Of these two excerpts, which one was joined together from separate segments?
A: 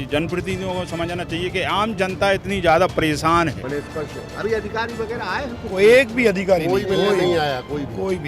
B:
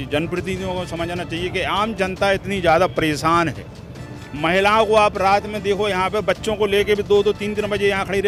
A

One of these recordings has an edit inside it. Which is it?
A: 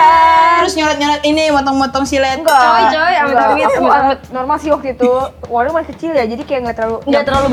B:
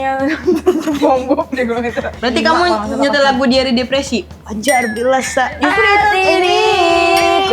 B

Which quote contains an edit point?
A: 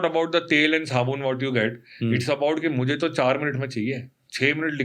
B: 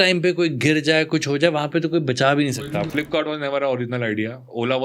B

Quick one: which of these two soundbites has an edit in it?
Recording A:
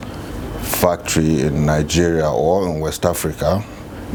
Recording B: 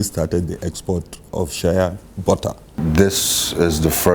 B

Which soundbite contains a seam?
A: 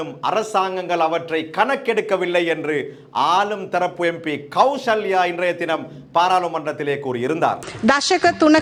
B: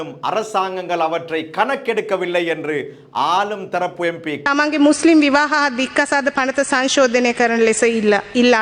B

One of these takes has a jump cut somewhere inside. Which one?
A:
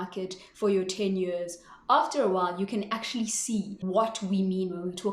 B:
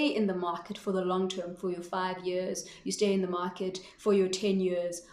A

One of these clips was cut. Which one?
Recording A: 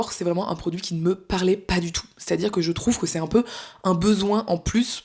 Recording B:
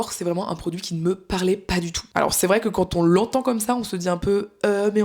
B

